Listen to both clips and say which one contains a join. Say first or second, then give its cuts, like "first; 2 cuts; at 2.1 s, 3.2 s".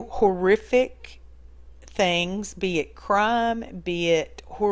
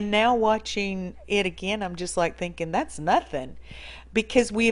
first; 1 cut; at 2.5 s